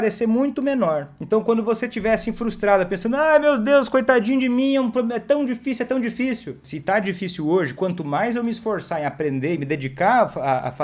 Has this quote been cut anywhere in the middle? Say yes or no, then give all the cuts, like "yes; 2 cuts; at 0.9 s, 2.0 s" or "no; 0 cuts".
yes; 2 cuts; at 1.1 s, 6.7 s